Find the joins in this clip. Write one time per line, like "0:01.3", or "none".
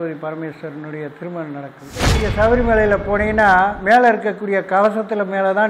0:02.2